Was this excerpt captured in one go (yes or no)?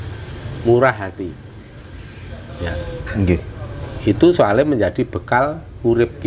yes